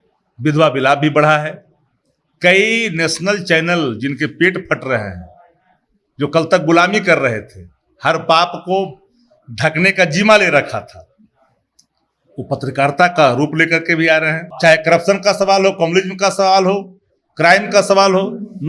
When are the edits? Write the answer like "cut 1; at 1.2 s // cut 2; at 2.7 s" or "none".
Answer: cut 1; at 14.4 s